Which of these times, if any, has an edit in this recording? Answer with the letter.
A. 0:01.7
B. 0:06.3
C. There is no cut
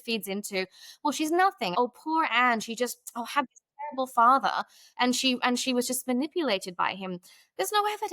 A